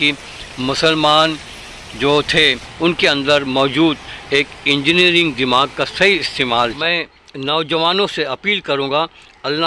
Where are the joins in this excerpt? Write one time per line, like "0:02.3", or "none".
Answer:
0:02.7
0:06.8